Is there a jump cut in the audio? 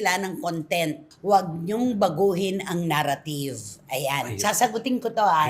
no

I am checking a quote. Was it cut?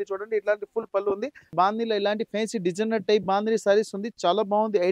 yes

